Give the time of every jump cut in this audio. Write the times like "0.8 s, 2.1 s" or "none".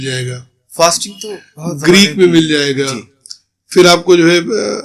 none